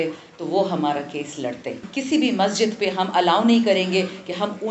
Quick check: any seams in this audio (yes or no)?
yes